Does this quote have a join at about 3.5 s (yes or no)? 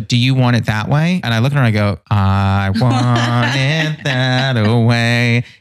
no